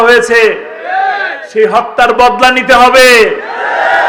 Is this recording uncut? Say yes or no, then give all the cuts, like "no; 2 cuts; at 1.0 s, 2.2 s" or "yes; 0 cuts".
yes; 0 cuts